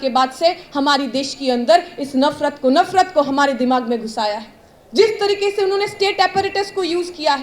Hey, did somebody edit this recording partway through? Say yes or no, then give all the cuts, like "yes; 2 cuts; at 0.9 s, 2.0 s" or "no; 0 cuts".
no; 0 cuts